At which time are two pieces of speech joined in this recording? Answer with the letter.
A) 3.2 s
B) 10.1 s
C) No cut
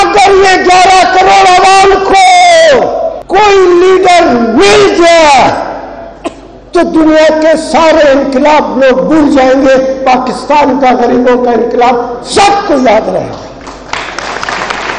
A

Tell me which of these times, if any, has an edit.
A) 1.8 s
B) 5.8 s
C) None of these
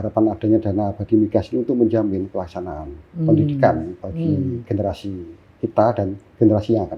C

